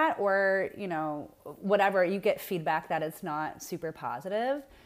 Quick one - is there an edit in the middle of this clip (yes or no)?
no